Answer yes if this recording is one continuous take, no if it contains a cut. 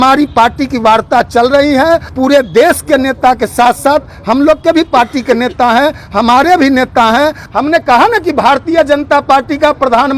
no